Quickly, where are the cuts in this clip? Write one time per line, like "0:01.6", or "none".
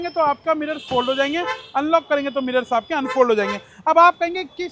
none